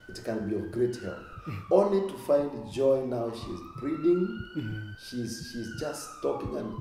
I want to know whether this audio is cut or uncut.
cut